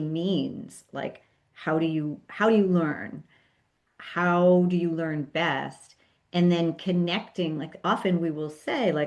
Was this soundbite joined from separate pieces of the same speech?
no; 0 cuts

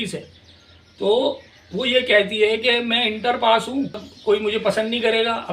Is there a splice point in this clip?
yes; 1 cut; at 4.1 s

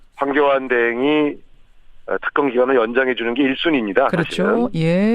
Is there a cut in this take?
yes; 1 cut; at 3.6 s

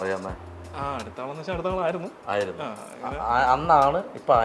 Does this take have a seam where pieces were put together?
no; 0 cuts

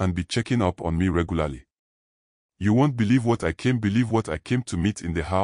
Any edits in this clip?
no; 0 cuts

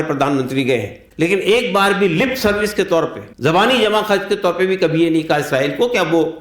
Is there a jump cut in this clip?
yes; 2 cuts; at 1.0 s, 3.2 s

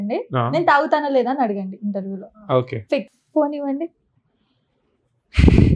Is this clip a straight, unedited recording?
yes; 0 cuts

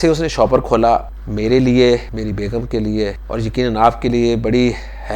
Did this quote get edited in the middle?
yes; 3 cuts; at 1.2 s, 2.1 s, 3.2 s

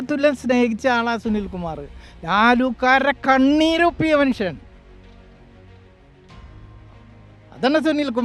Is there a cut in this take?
no; 0 cuts

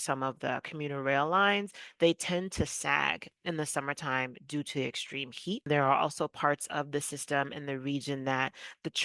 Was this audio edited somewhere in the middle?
yes; 1 cut; at 5.6 s

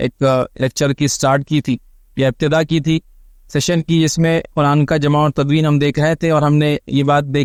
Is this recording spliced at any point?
no; 0 cuts

